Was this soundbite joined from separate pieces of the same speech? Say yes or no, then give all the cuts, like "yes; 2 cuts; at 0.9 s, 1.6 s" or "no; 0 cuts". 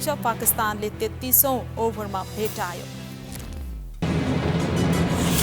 yes; 1 cut; at 4.0 s